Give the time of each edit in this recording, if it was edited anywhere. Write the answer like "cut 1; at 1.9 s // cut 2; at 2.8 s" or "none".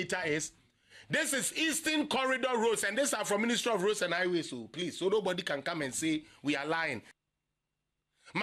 cut 1; at 7.1 s